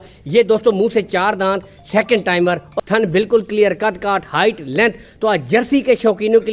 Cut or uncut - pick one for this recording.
cut